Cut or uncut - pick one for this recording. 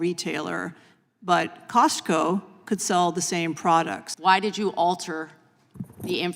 cut